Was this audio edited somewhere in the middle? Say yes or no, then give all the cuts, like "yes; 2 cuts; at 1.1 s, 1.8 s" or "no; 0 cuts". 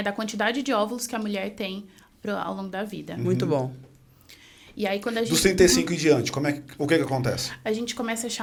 no; 0 cuts